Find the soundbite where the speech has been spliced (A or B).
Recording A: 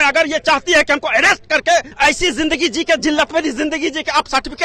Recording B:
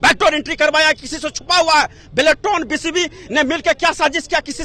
A